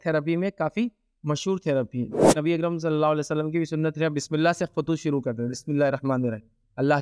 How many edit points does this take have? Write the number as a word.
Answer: one